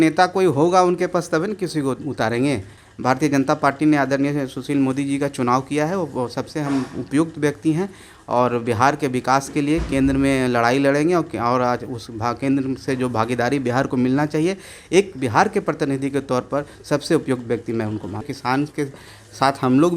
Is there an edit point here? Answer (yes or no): yes